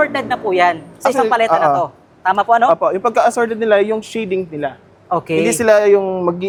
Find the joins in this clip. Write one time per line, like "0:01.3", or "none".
none